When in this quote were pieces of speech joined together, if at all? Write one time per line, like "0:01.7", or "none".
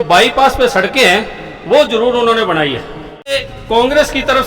0:03.4